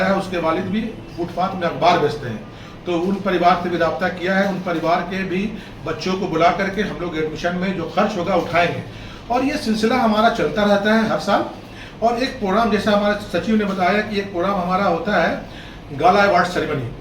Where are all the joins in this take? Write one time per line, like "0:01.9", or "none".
none

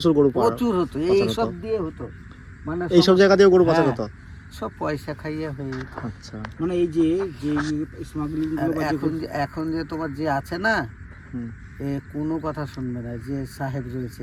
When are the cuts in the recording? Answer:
none

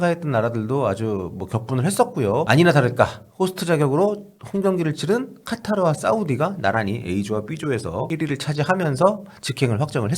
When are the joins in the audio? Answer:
0:02.5
0:08.1

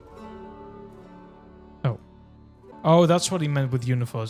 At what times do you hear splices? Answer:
0:02.7

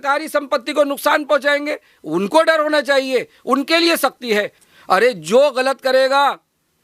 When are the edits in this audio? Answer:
0:04.6

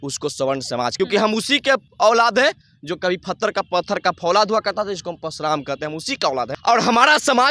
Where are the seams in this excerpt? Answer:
0:00.9
0:06.5

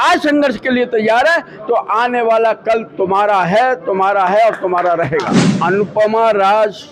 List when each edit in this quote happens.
0:05.4

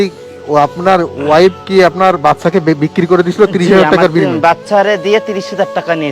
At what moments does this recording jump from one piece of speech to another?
none

